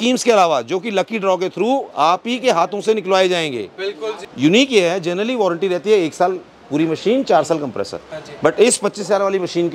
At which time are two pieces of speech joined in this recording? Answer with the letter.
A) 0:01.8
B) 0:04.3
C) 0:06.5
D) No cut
B